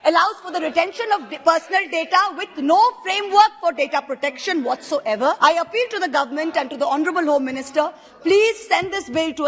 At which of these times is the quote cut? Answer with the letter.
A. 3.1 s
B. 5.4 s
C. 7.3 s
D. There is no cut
B